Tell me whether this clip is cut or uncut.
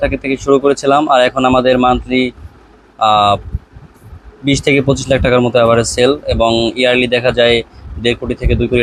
uncut